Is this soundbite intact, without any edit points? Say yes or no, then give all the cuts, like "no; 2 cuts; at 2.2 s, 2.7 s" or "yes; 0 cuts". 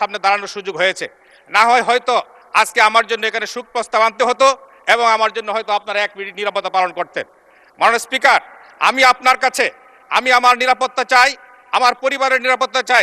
yes; 0 cuts